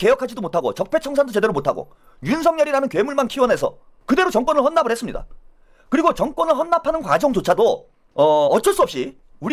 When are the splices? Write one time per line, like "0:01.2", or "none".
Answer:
none